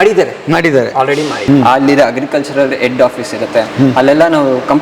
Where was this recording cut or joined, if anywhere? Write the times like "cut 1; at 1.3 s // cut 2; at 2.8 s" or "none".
cut 1; at 1.4 s